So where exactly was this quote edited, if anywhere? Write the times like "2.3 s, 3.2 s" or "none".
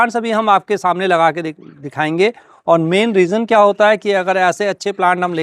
none

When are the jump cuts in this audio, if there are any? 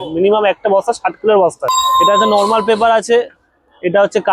1.8 s

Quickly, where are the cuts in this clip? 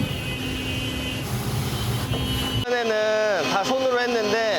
2.6 s

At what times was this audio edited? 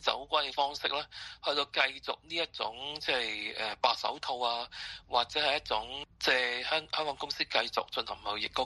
6.0 s

